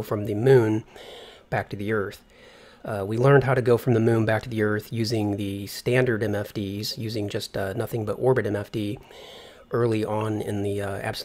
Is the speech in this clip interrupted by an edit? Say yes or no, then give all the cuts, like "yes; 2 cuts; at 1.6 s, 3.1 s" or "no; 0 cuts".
no; 0 cuts